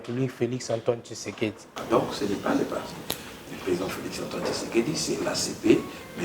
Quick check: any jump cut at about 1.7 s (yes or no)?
yes